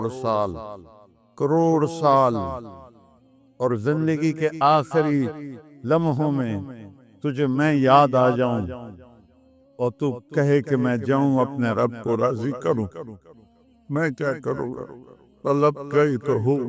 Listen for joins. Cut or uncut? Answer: uncut